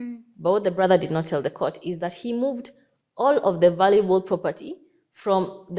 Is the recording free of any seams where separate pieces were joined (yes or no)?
yes